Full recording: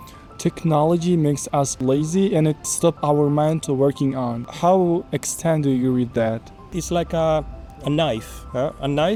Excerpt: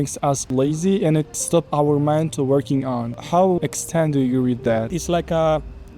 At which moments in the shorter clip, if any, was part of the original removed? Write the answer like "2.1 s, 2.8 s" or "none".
3.6 s, 4.9 s